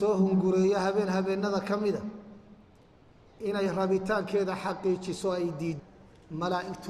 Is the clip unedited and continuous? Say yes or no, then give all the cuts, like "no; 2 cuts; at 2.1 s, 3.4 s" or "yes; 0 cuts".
no; 1 cut; at 5.8 s